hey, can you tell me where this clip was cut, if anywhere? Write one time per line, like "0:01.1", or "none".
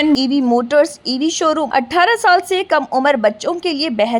0:01.6

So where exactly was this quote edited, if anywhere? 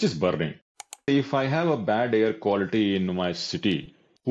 0:00.9

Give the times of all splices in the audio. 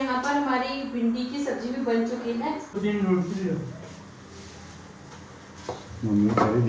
0:02.7

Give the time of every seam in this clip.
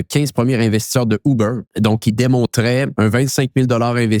0:01.6
0:02.9

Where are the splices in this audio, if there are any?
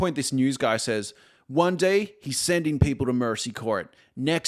none

